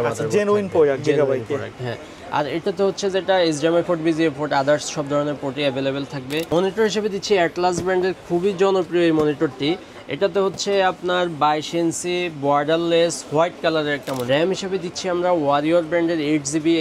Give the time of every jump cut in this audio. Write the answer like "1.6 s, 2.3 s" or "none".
6.5 s, 14.2 s